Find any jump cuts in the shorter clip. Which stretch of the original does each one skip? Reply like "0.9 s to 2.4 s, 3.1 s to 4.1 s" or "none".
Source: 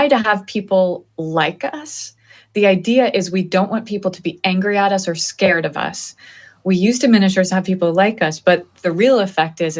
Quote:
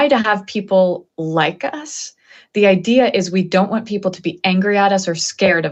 none